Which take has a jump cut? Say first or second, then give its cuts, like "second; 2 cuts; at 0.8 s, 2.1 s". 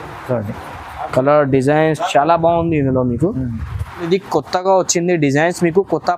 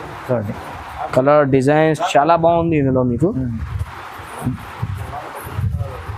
first; 1 cut; at 4.0 s